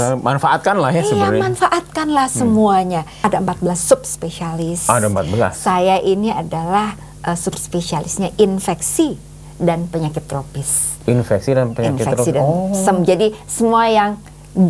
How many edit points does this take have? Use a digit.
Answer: 1